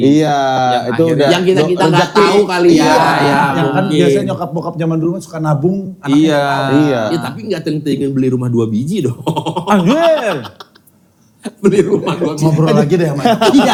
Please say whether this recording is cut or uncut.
uncut